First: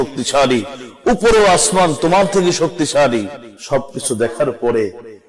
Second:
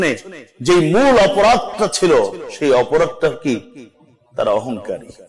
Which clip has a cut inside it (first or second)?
first